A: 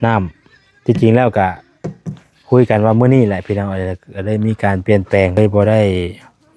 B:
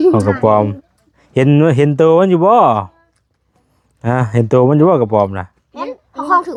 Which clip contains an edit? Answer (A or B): A